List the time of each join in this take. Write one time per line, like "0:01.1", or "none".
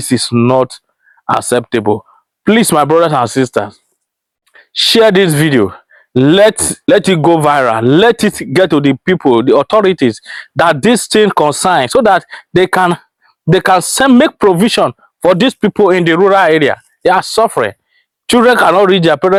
none

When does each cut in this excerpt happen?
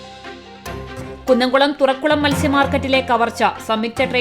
0:01.2

